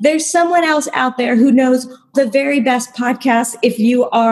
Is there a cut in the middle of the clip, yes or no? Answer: yes